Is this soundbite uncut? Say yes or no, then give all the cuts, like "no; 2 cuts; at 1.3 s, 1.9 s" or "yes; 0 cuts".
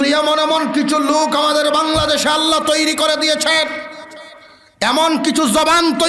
yes; 0 cuts